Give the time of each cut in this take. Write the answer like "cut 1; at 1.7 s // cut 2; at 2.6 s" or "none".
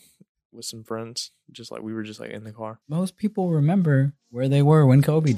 cut 1; at 2.8 s